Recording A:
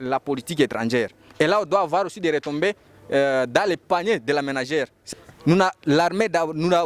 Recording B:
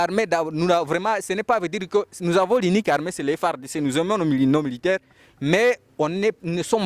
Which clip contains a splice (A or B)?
A